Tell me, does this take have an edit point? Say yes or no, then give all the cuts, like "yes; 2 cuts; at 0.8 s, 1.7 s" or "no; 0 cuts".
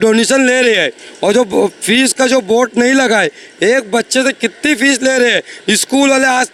no; 0 cuts